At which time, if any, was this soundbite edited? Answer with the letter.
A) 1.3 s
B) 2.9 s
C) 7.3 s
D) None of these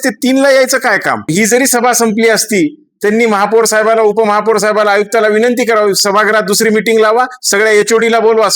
A